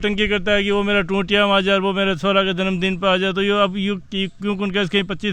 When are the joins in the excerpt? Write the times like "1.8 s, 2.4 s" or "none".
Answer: none